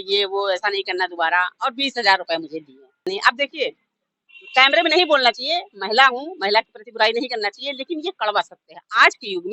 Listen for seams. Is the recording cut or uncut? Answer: cut